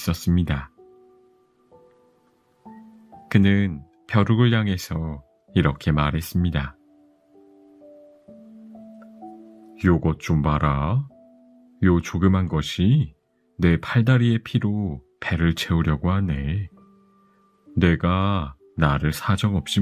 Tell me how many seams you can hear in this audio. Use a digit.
0